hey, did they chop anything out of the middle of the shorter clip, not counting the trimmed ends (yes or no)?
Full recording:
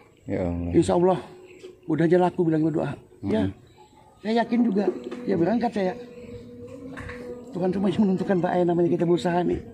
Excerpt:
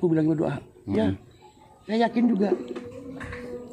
yes